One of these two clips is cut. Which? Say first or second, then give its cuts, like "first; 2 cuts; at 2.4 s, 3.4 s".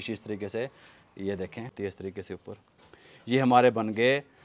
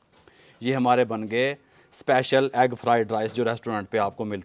first; 1 cut; at 1.7 s